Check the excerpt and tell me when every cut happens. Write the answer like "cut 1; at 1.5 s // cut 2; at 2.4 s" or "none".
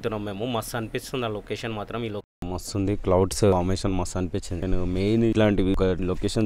cut 1; at 2.3 s